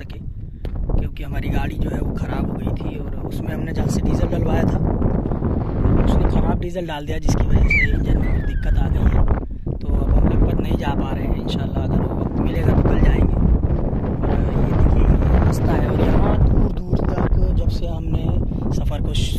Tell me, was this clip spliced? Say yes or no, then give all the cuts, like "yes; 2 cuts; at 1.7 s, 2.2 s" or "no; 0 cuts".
no; 0 cuts